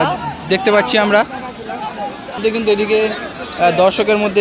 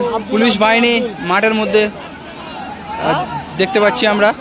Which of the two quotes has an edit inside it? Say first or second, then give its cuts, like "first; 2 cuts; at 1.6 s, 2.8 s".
first; 1 cut; at 2.3 s